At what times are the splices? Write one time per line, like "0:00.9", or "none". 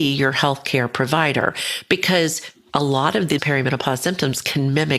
0:03.4

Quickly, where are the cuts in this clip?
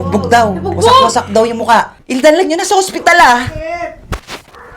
0:02.0

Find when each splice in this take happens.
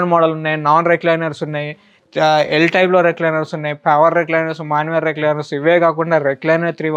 none

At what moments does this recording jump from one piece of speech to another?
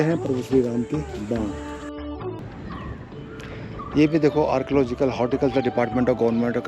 0:02.4

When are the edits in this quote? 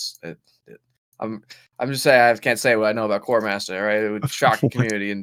none

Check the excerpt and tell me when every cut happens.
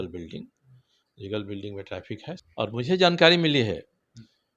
0:02.4

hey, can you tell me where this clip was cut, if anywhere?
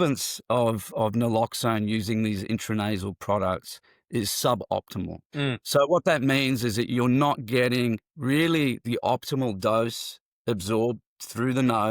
0:05.6

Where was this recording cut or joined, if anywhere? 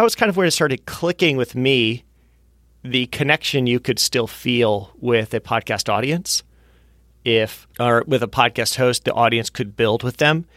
none

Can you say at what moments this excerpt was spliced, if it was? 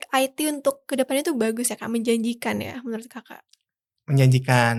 none

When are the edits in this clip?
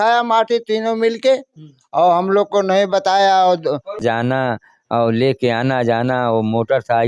0:04.0

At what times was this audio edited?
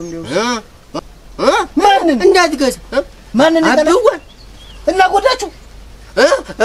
0:01.1

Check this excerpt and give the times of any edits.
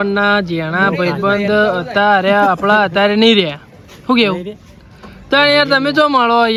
none

